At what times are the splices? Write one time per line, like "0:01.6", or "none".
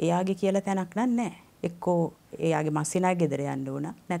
0:01.4